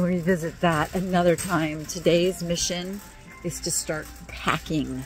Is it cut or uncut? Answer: uncut